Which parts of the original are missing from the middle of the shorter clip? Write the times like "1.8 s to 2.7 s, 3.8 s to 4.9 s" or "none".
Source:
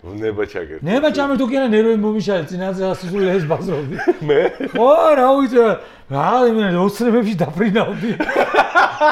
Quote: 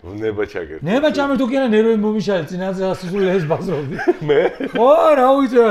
none